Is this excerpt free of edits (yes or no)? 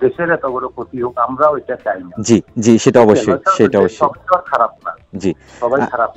yes